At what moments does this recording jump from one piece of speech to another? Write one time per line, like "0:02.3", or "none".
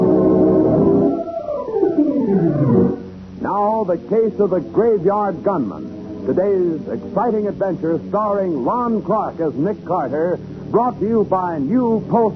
0:01.8